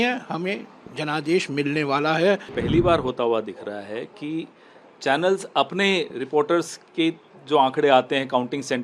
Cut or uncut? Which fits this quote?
cut